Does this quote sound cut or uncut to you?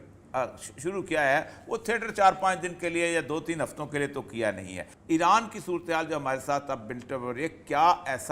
cut